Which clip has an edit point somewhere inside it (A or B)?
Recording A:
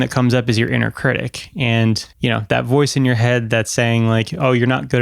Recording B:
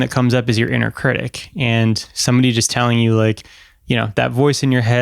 A